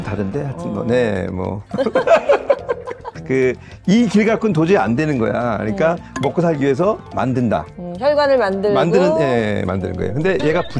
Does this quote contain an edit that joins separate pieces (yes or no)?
no